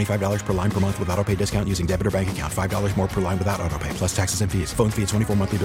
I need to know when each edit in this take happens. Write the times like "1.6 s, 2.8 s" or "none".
none

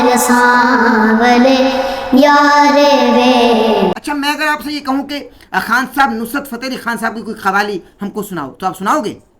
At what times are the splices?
4.0 s

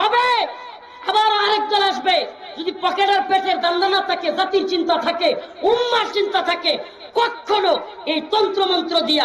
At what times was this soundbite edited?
none

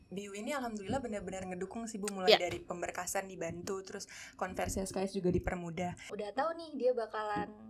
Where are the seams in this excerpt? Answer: 6.1 s

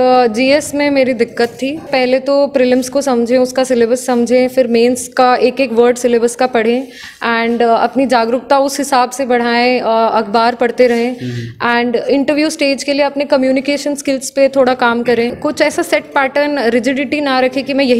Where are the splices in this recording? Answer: 1.9 s, 15.4 s

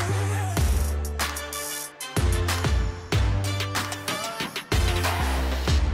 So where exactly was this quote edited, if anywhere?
none

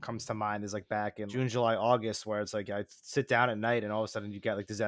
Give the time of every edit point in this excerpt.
1.3 s

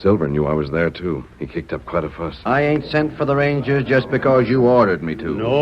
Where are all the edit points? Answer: 2.4 s

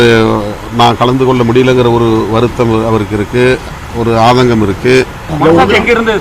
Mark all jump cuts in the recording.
5.2 s

